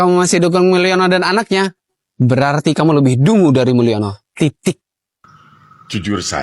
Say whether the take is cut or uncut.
uncut